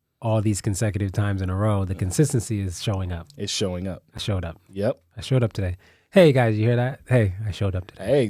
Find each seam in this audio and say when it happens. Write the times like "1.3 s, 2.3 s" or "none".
none